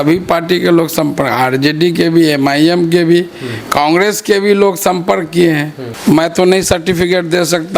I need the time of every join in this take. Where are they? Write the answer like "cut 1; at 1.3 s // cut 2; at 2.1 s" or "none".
cut 1; at 5.8 s